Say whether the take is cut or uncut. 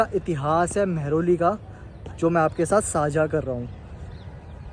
uncut